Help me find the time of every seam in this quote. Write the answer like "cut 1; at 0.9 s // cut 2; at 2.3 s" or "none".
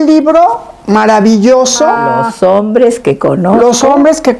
cut 1; at 2.0 s

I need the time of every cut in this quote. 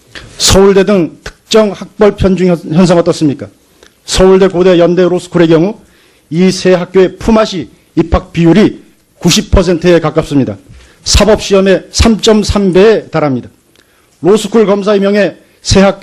none

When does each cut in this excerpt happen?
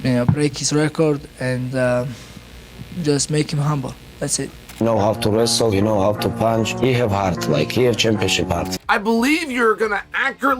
cut 1; at 4.8 s // cut 2; at 8.7 s

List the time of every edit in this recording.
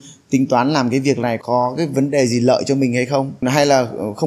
cut 1; at 1.4 s

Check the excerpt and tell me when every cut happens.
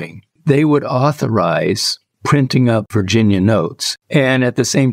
cut 1; at 2.9 s // cut 2; at 3.8 s

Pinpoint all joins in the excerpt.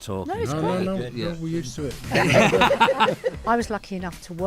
cut 1; at 2.1 s // cut 2; at 3.4 s

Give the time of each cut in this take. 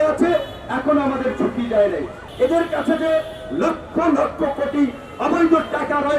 cut 1; at 2.2 s

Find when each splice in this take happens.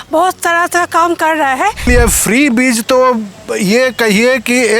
cut 1; at 1.9 s

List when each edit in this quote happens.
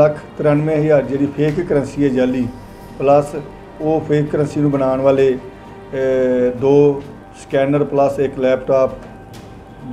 none

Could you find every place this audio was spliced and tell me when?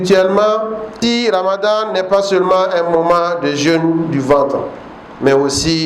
cut 1; at 1.0 s

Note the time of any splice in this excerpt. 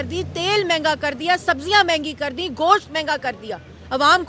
none

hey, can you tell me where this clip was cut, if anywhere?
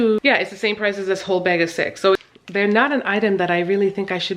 cut 1; at 2.2 s

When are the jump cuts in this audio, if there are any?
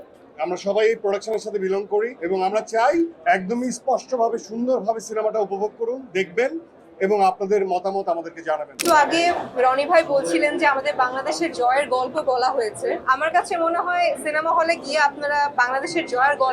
cut 1; at 2.2 s // cut 2; at 3.2 s // cut 3; at 8.8 s // cut 4; at 13.0 s

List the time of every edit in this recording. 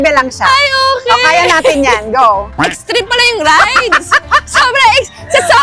none

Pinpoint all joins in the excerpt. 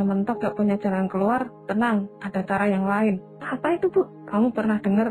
none

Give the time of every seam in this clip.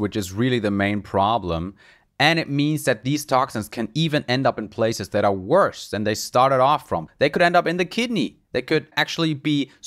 cut 1; at 7.1 s // cut 2; at 8.9 s

